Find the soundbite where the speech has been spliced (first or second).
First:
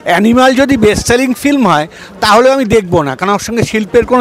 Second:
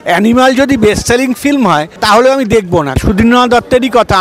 second